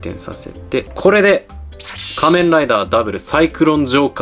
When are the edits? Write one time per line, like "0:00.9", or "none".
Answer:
0:00.9